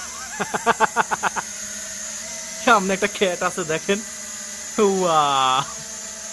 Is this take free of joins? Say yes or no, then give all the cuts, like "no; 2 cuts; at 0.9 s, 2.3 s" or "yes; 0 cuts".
yes; 0 cuts